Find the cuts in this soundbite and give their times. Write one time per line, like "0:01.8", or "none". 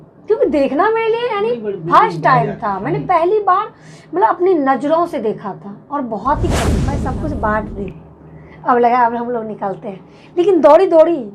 0:07.0